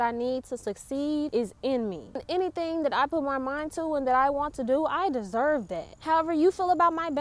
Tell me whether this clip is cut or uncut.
cut